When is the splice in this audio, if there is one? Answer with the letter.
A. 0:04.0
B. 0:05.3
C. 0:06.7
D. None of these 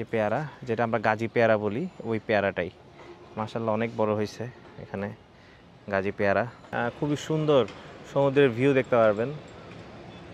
C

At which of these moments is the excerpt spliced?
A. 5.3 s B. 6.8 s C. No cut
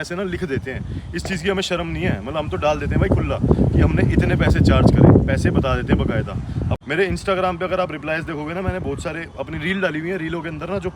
B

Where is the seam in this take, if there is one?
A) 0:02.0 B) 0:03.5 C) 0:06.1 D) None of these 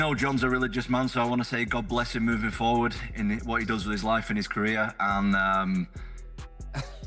D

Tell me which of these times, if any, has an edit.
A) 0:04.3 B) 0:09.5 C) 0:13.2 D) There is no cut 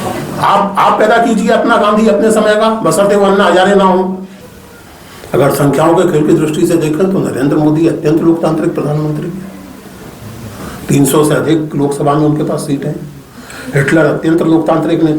A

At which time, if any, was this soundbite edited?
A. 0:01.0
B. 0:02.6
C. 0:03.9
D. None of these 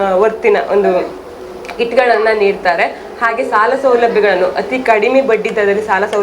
D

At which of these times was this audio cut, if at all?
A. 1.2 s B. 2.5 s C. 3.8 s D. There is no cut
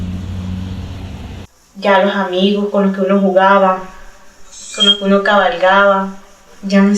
A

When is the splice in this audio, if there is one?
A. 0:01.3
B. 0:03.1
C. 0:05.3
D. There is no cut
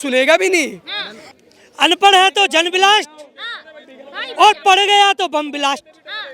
A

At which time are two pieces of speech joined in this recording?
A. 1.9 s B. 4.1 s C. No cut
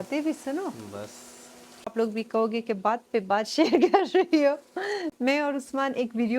A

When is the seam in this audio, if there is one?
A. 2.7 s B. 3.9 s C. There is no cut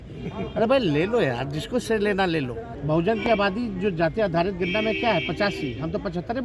A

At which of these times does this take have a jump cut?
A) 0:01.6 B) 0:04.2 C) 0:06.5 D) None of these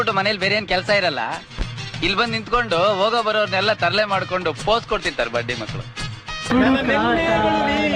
C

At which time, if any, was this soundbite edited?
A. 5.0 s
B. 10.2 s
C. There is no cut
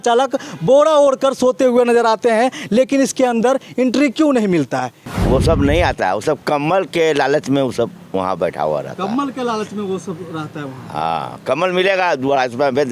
A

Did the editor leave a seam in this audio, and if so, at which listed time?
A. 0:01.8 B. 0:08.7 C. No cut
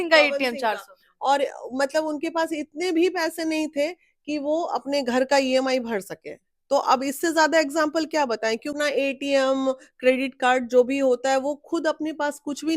B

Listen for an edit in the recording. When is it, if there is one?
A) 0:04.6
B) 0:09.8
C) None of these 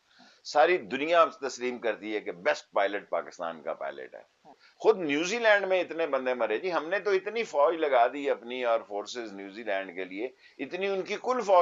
A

